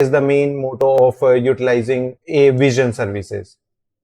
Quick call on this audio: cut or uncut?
cut